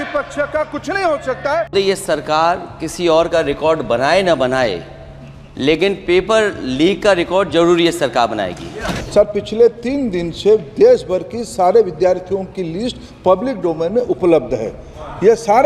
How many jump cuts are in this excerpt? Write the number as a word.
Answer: two